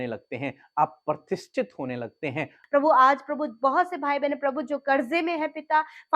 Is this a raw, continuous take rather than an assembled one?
no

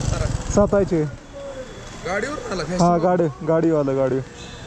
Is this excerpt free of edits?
yes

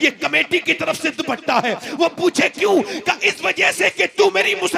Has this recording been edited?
no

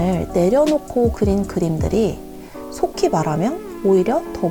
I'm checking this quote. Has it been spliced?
no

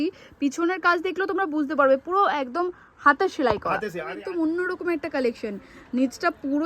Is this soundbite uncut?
no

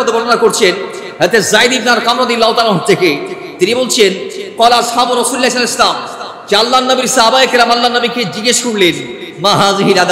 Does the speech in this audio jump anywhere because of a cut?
no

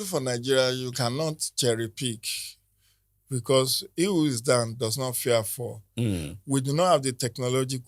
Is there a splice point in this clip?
no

